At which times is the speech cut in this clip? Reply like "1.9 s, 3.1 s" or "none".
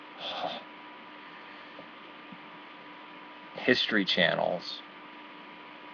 3.4 s